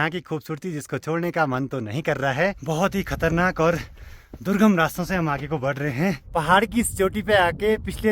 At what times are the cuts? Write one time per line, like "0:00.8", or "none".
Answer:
0:02.6
0:06.2